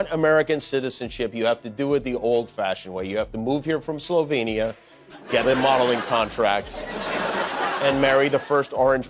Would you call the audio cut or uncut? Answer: uncut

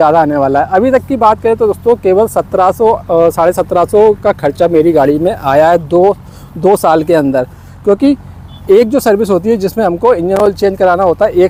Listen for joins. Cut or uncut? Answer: uncut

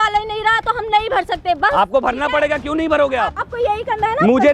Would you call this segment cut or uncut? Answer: cut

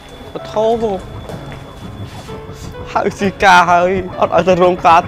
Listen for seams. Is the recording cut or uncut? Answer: uncut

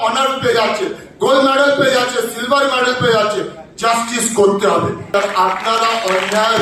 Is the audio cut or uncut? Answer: cut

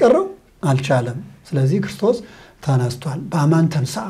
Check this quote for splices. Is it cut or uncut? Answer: uncut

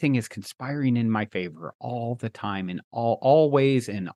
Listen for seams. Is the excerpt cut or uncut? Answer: uncut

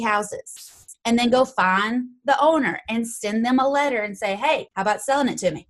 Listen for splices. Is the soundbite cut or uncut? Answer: cut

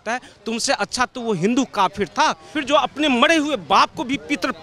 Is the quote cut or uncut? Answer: uncut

